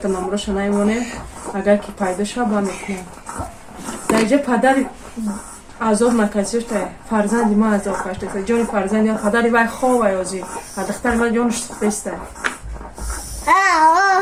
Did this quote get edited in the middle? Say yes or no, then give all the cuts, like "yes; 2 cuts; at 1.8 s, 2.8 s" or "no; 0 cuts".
no; 0 cuts